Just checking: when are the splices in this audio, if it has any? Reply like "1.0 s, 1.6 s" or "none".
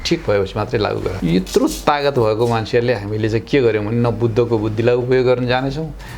1.2 s